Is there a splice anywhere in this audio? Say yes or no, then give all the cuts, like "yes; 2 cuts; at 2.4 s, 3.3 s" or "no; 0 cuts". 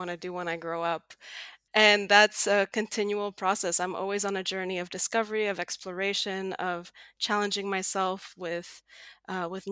yes; 1 cut; at 1.5 s